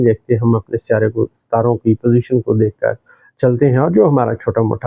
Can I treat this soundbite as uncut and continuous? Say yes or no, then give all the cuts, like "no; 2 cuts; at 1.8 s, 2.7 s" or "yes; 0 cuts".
yes; 0 cuts